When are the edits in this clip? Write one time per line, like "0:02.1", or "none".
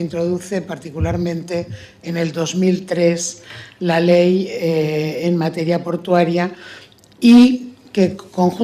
0:03.5